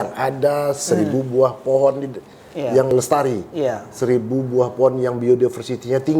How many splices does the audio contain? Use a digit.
1